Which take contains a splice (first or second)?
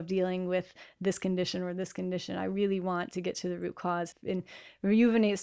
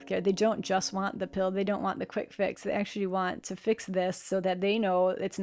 first